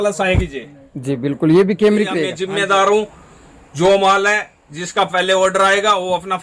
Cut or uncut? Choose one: cut